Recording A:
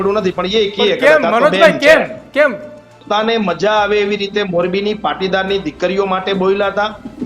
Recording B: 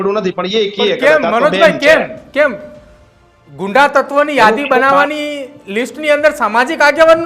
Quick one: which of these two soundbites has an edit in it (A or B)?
A